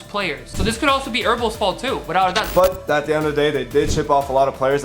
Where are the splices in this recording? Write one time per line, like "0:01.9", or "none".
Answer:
0:02.4